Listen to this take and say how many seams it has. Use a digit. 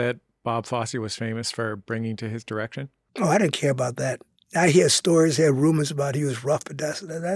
2